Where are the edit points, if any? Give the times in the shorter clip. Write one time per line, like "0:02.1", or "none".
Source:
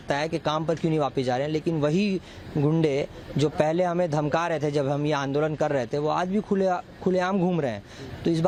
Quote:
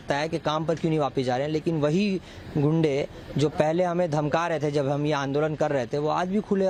none